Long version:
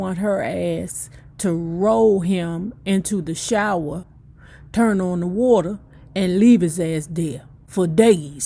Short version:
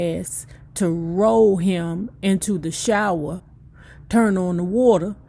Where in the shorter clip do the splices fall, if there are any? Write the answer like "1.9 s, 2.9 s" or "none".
none